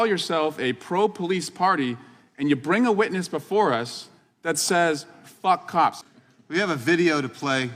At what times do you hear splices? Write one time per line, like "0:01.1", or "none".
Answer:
0:06.0